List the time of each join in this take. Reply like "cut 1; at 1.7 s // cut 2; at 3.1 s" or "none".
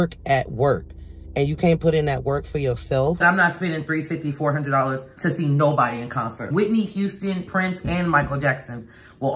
cut 1; at 3.2 s // cut 2; at 6.5 s